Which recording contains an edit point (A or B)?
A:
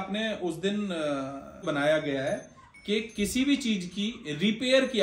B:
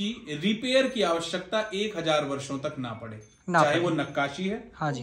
A